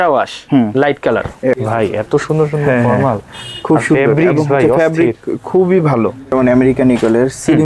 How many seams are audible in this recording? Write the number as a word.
two